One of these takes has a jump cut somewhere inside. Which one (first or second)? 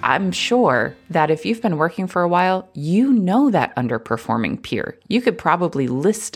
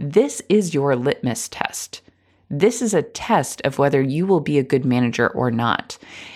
first